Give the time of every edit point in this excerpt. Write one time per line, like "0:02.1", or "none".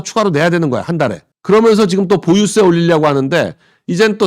0:01.3